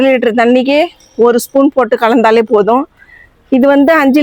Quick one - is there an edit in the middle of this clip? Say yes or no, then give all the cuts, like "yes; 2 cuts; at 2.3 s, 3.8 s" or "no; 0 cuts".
no; 0 cuts